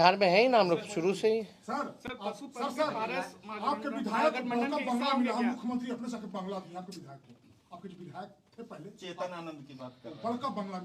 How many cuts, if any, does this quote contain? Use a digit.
0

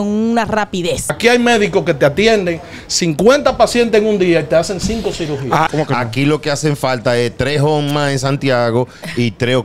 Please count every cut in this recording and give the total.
2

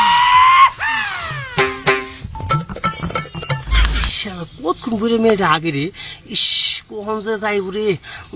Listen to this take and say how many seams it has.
1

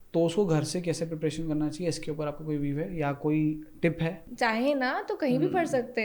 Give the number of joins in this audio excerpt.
1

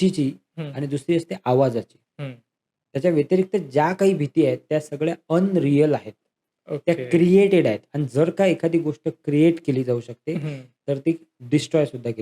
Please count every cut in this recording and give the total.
0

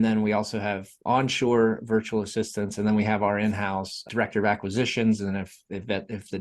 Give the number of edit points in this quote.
2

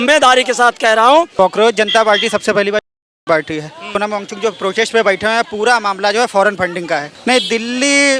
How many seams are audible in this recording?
2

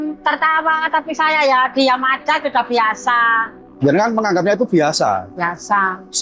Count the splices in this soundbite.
1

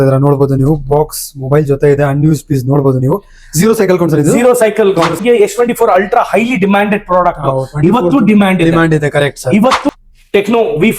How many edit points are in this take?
2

